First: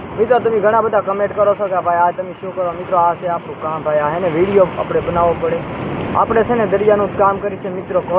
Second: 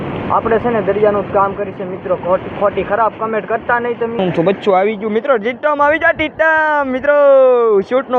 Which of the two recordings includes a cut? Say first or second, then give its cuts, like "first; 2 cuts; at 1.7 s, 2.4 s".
second; 1 cut; at 4.2 s